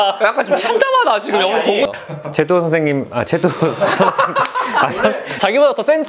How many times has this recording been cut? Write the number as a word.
one